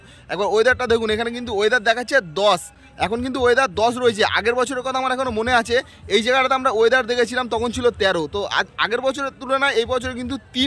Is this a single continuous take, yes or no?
yes